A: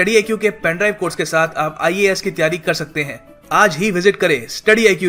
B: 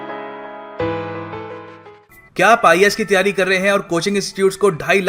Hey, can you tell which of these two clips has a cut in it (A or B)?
B